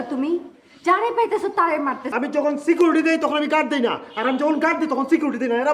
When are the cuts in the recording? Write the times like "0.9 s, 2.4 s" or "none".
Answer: 2.1 s